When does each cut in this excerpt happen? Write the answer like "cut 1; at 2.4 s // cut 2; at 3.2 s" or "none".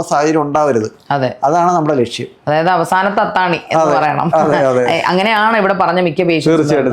none